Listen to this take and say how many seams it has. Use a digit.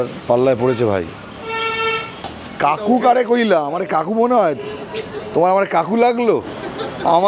1